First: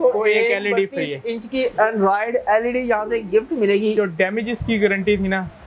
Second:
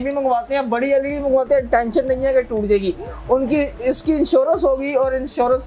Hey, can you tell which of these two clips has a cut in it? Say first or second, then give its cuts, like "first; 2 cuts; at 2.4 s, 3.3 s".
first; 1 cut; at 3.9 s